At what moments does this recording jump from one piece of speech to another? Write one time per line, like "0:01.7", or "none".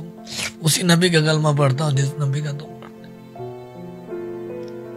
none